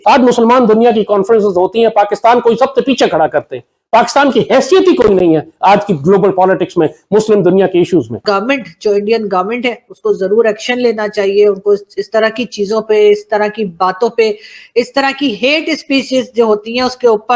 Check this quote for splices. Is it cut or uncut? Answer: cut